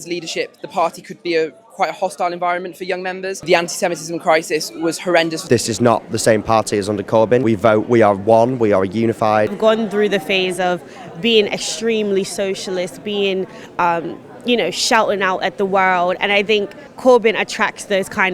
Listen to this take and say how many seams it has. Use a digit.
5